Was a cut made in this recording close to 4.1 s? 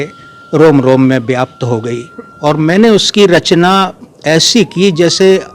no; 1 cut; at 2.3 s

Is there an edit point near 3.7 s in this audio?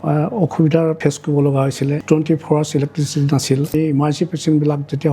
yes; 3 cuts; at 1.0 s, 2.0 s, 3.7 s

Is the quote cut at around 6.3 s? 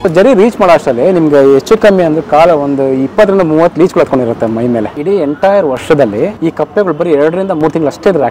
yes; 2 cuts; at 4.9 s, 6.3 s

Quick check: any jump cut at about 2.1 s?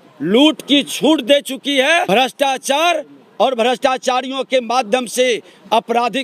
no; 0 cuts

